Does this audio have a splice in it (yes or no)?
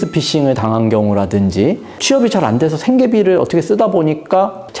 yes